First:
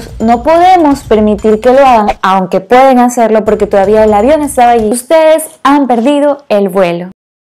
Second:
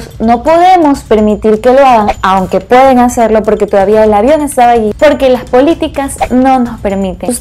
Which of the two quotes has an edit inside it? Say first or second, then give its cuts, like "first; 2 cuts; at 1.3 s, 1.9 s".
first; 1 cut; at 4.9 s